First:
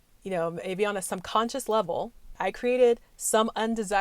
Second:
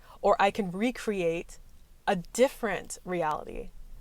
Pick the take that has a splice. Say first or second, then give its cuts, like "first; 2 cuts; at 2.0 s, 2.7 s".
first; 1 cut; at 2.4 s